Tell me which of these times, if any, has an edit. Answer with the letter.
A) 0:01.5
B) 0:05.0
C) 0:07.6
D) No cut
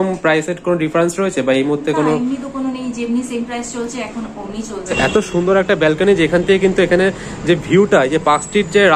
B